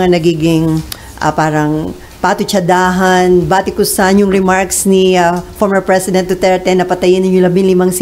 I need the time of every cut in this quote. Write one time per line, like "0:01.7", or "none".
none